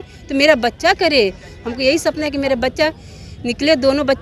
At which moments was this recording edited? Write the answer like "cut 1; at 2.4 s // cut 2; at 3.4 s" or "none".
none